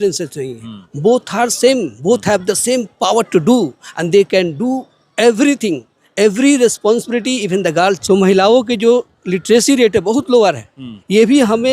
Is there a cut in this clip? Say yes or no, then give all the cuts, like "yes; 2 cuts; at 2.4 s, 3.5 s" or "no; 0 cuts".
yes; 1 cut; at 8.0 s